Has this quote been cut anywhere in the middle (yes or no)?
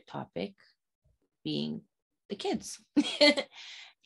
no